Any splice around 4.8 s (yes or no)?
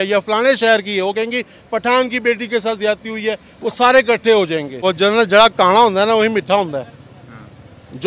yes